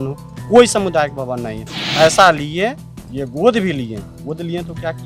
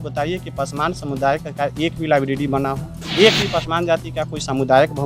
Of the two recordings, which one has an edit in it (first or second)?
second